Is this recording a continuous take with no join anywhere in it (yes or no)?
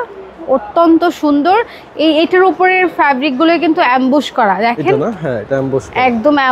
yes